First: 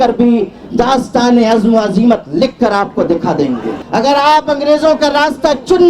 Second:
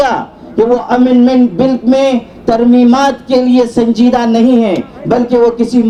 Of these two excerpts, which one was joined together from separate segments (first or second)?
first